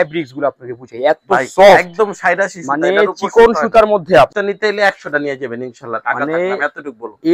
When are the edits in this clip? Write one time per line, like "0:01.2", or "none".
0:04.3